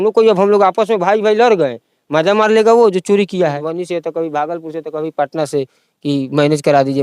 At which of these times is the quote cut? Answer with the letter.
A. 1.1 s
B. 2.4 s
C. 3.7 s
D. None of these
C